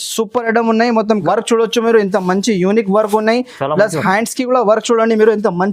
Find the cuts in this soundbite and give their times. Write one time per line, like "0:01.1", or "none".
0:01.2